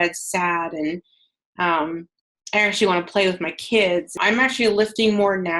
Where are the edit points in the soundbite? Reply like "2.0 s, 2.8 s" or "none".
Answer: 4.1 s